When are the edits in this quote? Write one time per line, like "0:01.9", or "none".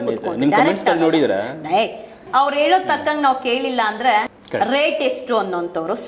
0:02.2
0:04.4